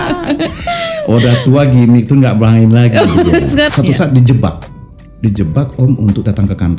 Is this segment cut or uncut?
cut